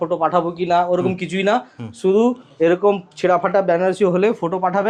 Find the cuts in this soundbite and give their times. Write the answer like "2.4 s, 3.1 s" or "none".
none

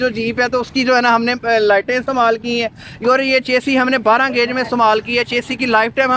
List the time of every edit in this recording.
none

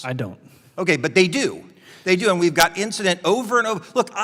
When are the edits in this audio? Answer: none

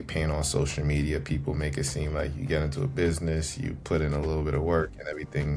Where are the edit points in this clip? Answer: none

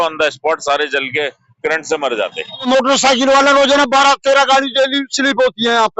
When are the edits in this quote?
2.7 s

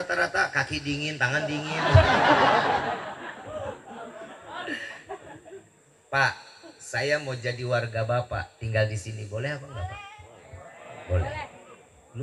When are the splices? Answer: none

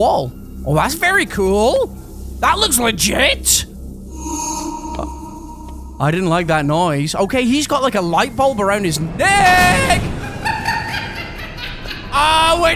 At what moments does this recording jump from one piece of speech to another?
none

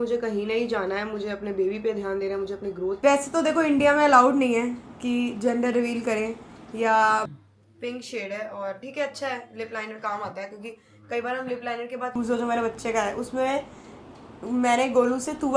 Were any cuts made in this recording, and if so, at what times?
3.0 s, 7.3 s, 12.1 s

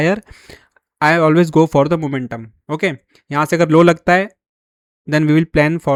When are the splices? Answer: none

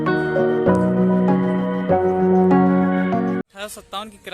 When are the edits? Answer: 3.4 s

